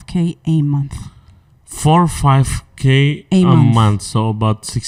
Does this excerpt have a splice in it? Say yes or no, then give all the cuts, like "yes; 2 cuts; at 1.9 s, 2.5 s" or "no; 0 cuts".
no; 0 cuts